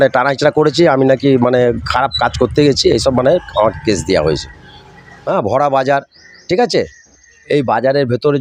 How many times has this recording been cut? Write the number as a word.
one